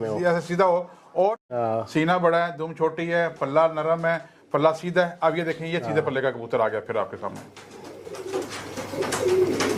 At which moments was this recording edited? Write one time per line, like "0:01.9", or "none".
0:01.5